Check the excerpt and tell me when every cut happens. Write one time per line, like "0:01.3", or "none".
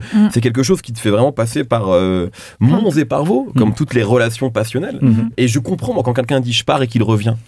0:05.3